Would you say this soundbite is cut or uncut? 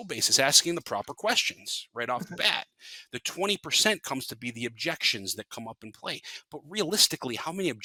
uncut